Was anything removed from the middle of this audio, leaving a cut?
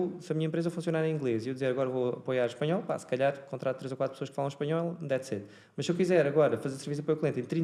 no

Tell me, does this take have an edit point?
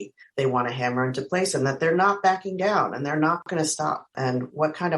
no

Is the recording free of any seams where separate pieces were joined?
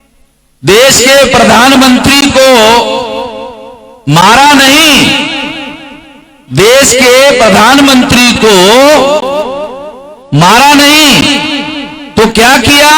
yes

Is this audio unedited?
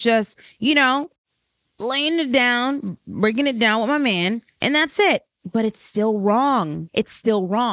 no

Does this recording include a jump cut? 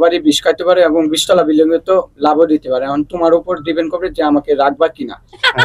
no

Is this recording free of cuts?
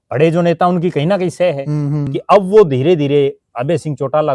no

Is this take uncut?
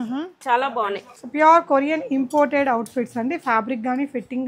no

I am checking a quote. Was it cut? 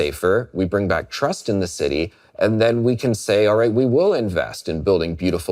no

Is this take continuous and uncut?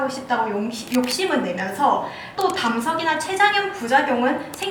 no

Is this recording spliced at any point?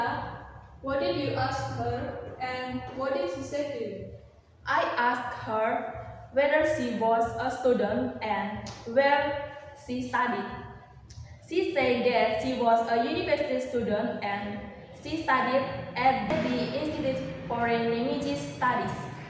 no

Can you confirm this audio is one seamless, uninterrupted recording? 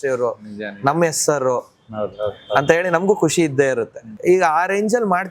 no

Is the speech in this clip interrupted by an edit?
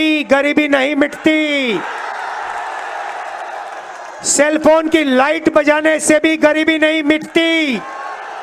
no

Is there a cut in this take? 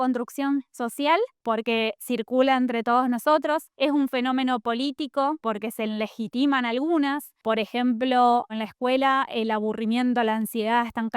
yes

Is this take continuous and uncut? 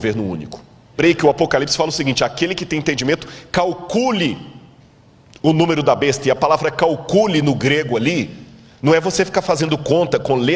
no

